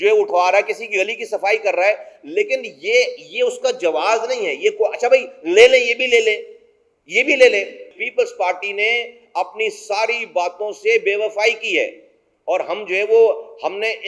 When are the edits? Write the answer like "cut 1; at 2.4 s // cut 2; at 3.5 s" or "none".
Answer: cut 1; at 8.0 s